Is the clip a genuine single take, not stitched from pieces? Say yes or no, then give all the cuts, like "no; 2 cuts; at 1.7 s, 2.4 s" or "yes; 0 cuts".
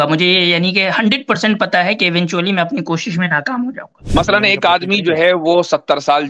no; 1 cut; at 4.0 s